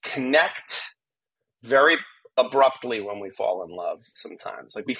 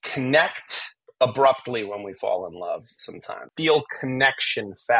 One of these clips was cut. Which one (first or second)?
second